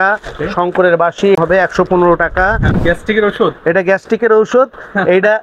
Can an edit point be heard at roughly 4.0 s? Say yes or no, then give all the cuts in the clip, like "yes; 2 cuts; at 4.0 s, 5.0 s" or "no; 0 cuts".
no; 2 cuts; at 1.4 s, 2.7 s